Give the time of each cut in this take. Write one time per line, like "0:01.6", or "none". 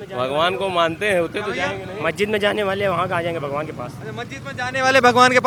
none